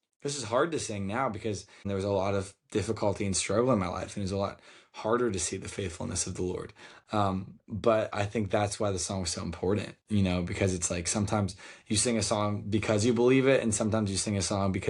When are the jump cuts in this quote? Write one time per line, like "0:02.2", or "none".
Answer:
0:01.8

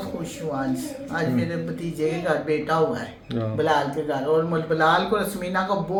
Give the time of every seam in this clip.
none

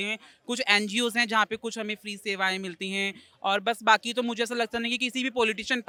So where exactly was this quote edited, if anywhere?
none

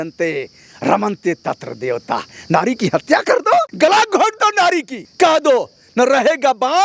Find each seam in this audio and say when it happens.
0:03.7
0:05.0

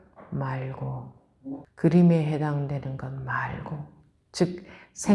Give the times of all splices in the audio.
0:01.7

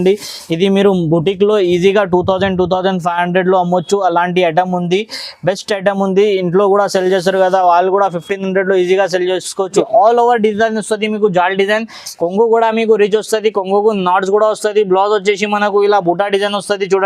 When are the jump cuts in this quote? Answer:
0:09.8

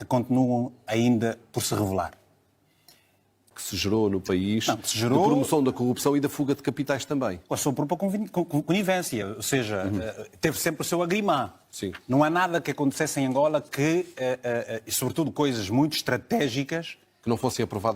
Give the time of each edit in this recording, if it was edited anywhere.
0:03.5

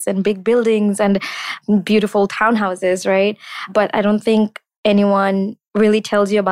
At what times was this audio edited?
0:05.6

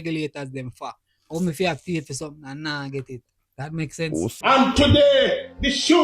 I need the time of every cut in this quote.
0:04.3

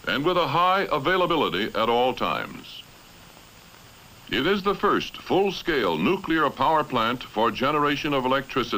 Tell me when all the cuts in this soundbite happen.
0:05.1

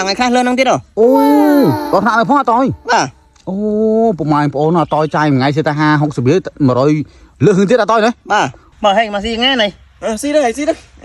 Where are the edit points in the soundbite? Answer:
0:08.6

